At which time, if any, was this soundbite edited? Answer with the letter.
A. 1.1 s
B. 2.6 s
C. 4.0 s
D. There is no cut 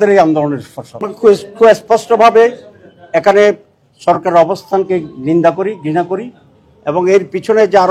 A